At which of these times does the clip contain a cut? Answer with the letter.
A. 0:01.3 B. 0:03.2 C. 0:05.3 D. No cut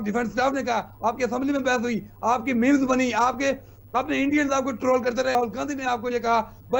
C